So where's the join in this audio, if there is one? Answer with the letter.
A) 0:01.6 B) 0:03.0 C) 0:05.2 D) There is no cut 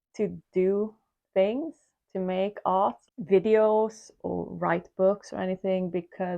B